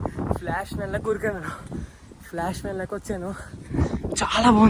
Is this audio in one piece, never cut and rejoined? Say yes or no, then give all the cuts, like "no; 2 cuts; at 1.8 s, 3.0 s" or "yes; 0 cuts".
yes; 0 cuts